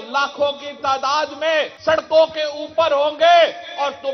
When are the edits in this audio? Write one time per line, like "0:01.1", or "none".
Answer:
0:01.7